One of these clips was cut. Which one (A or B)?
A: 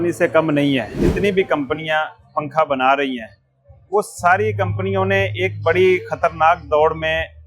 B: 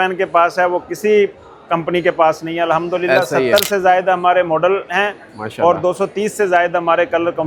A